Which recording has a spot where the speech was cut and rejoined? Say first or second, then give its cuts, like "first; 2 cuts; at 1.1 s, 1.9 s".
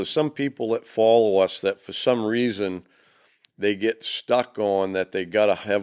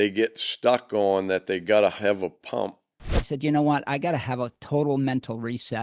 second; 1 cut; at 3.2 s